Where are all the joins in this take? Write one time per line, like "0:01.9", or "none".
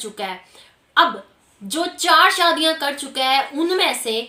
none